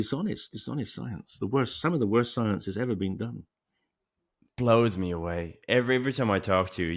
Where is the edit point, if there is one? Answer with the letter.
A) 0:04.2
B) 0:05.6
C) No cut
C